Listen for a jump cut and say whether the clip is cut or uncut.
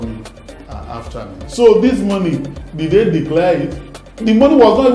cut